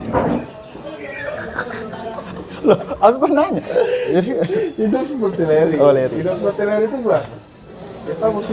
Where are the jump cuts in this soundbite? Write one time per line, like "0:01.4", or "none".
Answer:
0:02.3

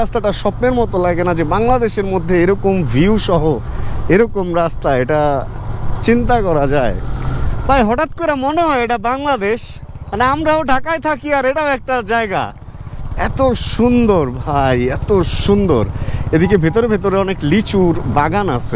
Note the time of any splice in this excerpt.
none

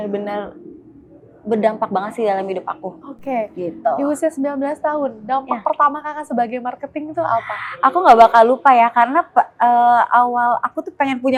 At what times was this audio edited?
none

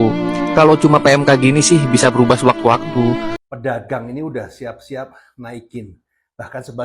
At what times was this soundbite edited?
0:03.3

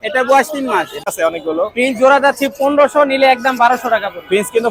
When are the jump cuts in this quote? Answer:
0:01.1

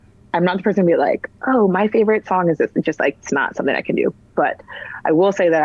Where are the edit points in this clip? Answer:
none

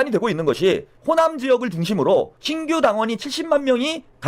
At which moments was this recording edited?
0:00.9
0:02.4

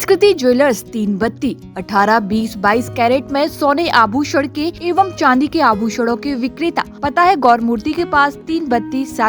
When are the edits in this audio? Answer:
0:04.8
0:06.9

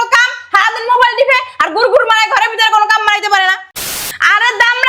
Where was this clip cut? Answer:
0:03.6

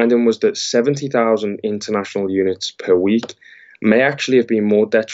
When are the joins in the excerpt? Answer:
none

